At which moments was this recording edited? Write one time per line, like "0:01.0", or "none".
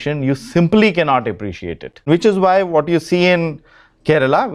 0:02.0